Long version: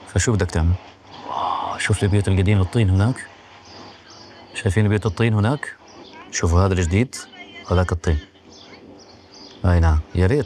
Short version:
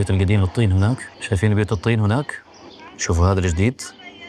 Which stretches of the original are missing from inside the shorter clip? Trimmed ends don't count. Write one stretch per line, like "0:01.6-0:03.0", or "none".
0:03.3-0:04.5